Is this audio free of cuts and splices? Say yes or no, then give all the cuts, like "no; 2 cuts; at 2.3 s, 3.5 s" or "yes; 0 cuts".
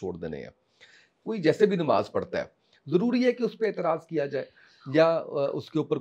yes; 0 cuts